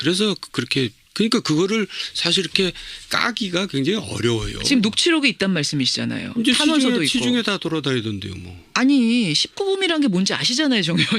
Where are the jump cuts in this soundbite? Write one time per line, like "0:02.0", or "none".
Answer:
0:08.0